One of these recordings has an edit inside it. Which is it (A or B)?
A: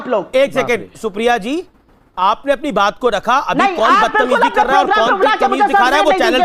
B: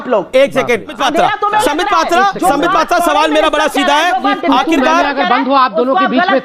B